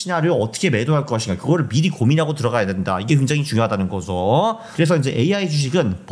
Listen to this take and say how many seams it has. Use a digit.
0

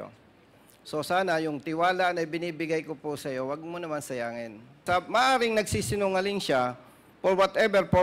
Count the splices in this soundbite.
1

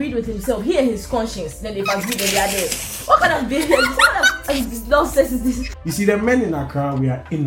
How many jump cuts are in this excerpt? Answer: 1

